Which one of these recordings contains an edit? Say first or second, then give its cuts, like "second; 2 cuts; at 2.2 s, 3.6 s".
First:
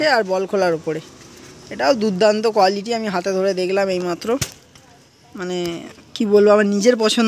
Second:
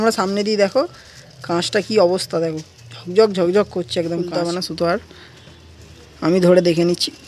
second; 1 cut; at 4.3 s